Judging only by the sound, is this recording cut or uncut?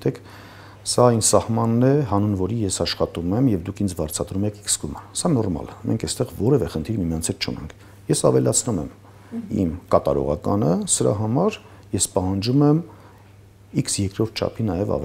uncut